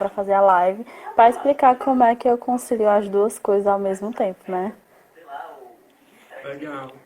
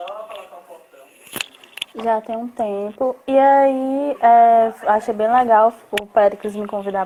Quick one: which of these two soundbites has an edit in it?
first; 1 cut; at 4.1 s

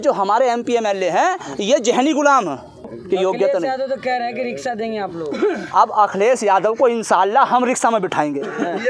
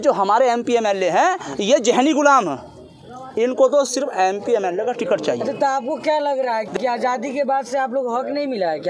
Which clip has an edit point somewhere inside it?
first; 1 cut; at 3.0 s

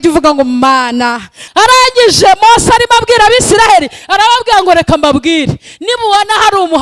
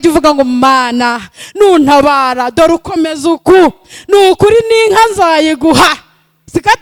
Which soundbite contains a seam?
first; 1 cut; at 1.4 s

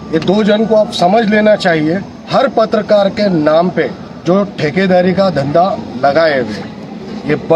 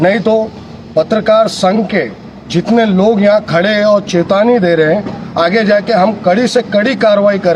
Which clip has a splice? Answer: first; 1 cut; at 2.1 s

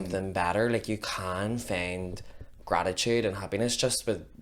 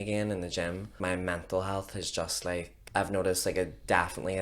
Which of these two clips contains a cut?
second; 2 cuts; at 1.0 s, 2.8 s

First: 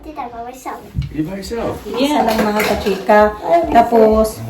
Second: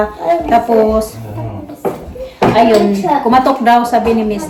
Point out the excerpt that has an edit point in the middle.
first; 1 cut; at 2.1 s

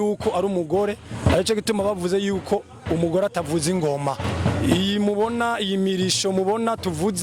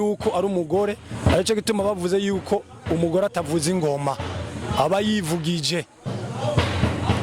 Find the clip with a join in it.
first; 1 cut; at 4.3 s

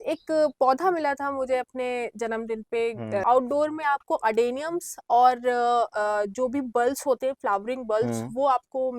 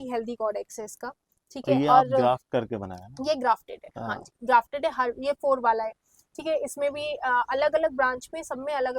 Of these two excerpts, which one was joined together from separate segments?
first; 1 cut; at 3.2 s

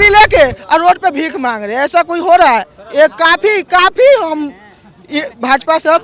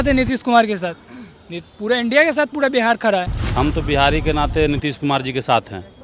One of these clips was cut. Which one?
second; 1 cut; at 3.4 s

